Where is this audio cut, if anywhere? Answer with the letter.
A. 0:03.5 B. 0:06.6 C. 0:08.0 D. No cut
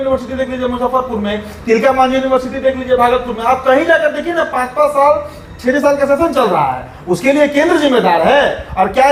D